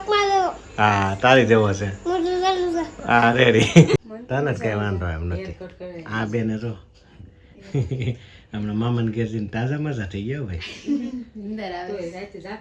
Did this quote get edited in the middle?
yes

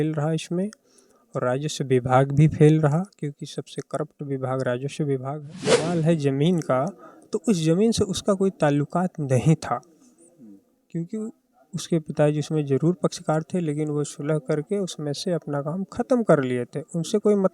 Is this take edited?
yes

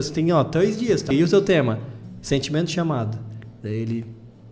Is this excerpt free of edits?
no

